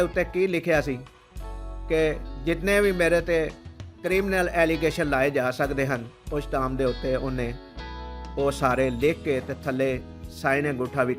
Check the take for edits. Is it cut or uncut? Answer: uncut